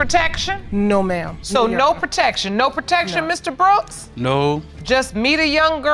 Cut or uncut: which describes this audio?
uncut